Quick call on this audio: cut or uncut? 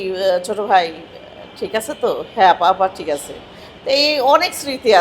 uncut